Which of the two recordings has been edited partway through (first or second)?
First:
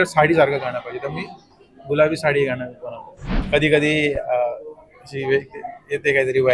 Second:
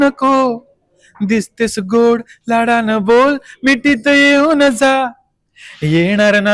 first